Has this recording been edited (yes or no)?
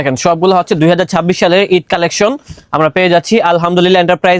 no